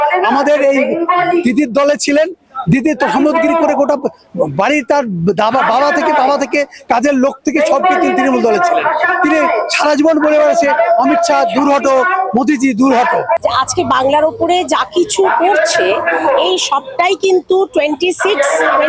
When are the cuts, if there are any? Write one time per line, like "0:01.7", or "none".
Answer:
0:13.4